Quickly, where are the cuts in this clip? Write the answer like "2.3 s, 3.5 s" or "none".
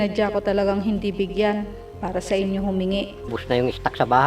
3.3 s